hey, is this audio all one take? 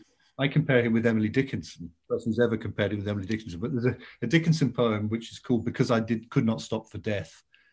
no; 1 cut; at 1.9 s

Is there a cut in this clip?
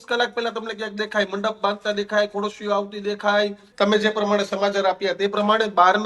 yes; 1 cut; at 3.6 s

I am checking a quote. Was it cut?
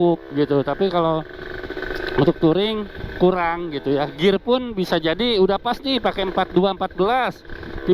no; 0 cuts

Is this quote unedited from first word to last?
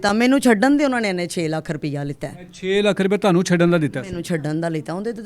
yes; 0 cuts

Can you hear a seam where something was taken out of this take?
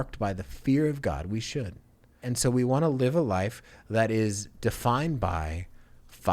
yes; 1 cut; at 2.2 s

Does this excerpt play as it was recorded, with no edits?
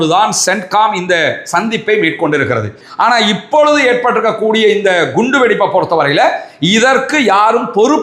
no; 1 cut; at 2.8 s

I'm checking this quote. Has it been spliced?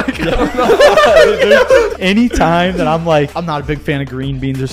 yes; 2 cuts; at 1.9 s, 3.4 s

